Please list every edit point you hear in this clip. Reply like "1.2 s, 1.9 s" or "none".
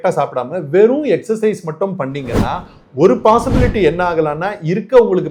none